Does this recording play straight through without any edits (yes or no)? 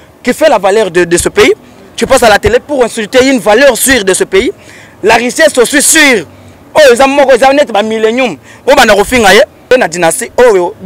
no